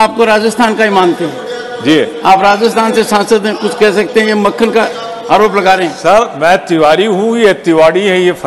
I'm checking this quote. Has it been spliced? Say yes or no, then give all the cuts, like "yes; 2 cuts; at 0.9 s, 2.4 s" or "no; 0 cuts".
no; 0 cuts